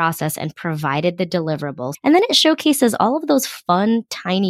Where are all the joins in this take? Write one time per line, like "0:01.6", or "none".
0:01.9